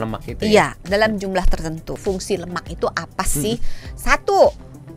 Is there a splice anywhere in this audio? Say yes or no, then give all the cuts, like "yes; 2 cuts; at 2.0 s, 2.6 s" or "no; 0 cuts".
yes; 1 cut; at 1.9 s